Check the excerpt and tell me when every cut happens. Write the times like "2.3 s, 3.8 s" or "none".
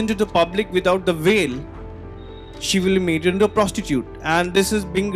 none